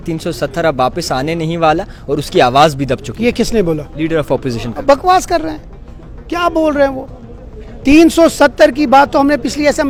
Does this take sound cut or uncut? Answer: uncut